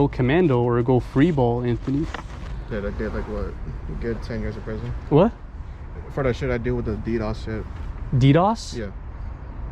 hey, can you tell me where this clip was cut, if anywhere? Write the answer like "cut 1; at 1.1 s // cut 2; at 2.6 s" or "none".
cut 1; at 2.6 s